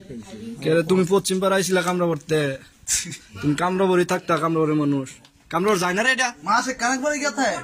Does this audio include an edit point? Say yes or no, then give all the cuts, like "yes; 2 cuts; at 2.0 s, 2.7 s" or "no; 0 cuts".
no; 0 cuts